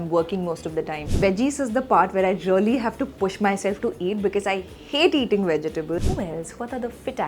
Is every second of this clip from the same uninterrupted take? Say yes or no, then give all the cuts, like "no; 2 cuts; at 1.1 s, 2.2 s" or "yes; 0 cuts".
no; 2 cuts; at 1.1 s, 6.0 s